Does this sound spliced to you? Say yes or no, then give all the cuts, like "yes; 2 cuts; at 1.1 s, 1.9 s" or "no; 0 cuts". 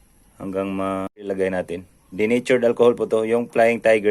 yes; 1 cut; at 1.3 s